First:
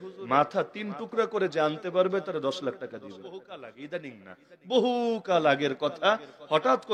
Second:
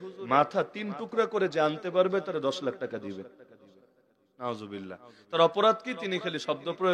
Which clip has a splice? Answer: first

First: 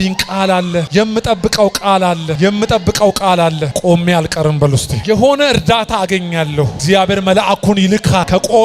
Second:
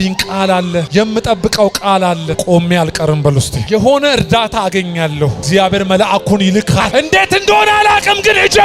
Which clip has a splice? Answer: second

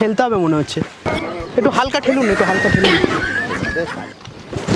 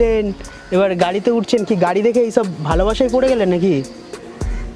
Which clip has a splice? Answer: first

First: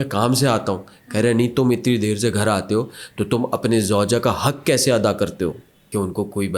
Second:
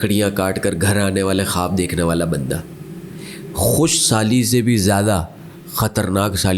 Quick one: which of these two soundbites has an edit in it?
first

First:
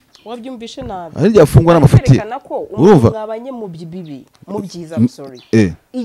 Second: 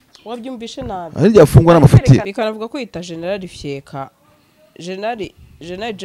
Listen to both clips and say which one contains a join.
second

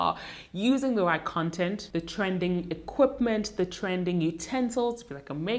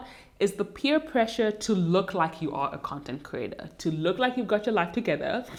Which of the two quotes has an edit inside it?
first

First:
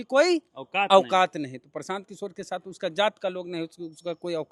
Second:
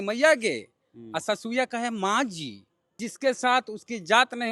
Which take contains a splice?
second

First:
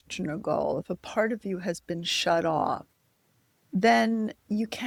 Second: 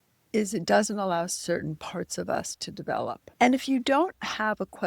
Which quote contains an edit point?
second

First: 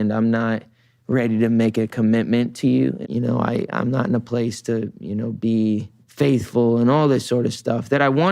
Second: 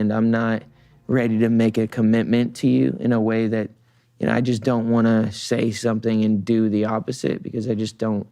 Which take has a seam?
first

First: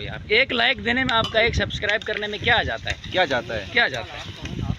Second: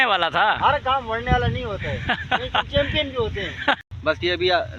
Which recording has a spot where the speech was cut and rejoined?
second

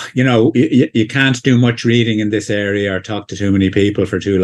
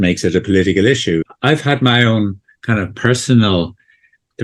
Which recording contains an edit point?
second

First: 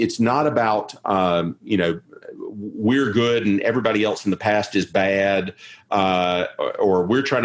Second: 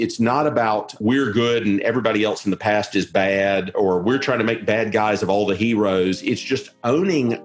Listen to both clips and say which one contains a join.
second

